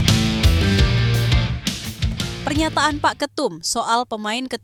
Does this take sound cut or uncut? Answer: uncut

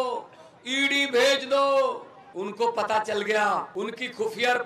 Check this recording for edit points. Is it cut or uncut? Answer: cut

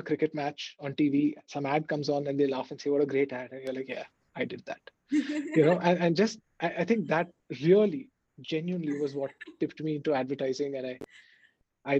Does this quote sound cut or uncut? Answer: uncut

